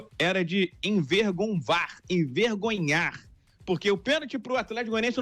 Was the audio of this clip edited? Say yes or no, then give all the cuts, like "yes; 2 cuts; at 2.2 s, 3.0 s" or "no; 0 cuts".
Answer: no; 0 cuts